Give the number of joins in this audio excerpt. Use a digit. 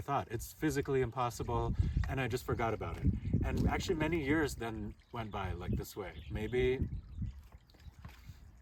0